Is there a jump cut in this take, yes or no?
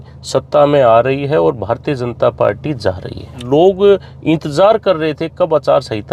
yes